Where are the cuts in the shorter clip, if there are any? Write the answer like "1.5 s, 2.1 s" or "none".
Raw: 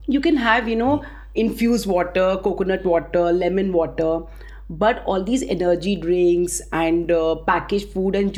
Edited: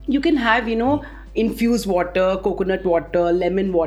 none